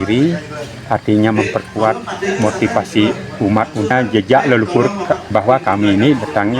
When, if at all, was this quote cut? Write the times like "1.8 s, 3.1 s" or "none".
3.9 s